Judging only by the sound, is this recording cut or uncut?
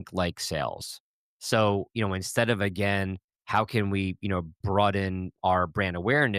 cut